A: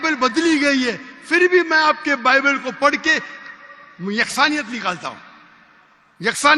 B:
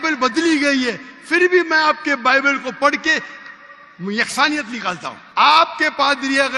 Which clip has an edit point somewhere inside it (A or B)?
B